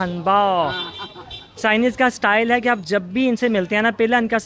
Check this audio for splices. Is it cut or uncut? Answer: uncut